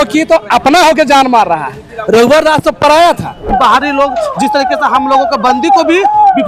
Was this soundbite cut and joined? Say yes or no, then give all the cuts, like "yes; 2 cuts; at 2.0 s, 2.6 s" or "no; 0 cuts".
yes; 1 cut; at 3.5 s